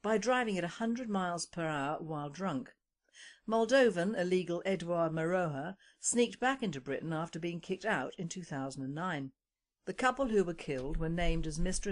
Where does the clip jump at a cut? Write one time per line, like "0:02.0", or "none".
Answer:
none